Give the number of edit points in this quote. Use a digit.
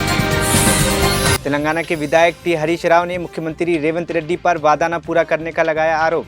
1